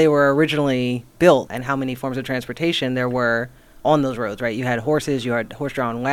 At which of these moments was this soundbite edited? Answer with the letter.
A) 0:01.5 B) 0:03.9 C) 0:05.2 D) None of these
A